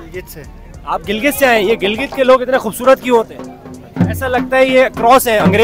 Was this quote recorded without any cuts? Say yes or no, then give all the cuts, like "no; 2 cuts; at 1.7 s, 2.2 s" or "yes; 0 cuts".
yes; 0 cuts